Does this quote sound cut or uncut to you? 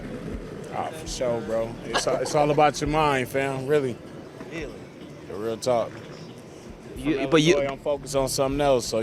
uncut